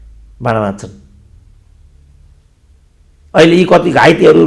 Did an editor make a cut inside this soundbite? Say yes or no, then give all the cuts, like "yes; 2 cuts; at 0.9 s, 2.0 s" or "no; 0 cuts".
no; 0 cuts